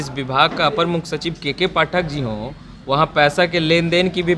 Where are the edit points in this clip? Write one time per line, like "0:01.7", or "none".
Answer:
none